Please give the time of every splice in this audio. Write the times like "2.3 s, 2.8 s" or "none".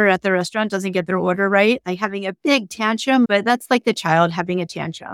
3.3 s

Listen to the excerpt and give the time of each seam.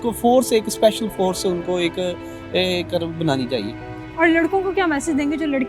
none

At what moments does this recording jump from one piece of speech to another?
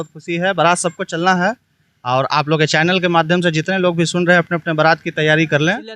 none

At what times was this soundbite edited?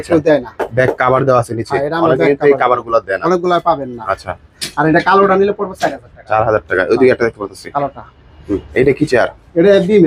none

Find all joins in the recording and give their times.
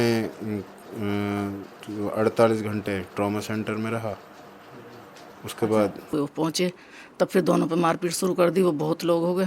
6.1 s

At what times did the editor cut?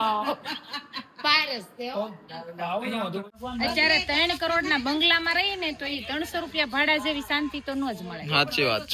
3.2 s

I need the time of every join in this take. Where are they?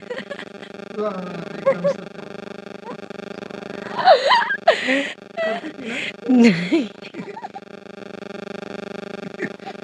none

